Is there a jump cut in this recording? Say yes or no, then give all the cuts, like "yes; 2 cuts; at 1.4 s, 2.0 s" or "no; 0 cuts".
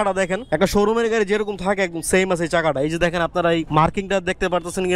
no; 0 cuts